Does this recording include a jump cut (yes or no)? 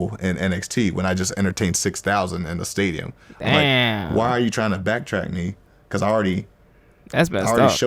yes